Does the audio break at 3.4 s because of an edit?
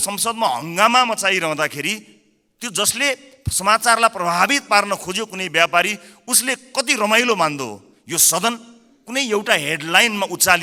no; 0 cuts

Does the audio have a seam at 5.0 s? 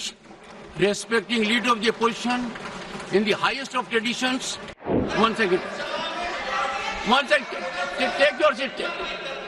yes; 1 cut; at 5.0 s

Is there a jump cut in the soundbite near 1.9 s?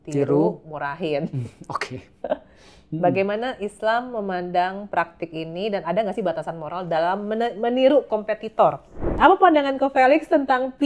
no; 2 cuts; at 5.8 s, 9.1 s

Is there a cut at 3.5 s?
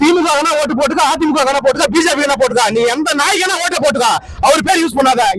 no; 0 cuts

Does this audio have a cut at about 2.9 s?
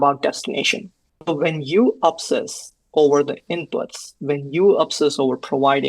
no; 1 cut; at 1.2 s

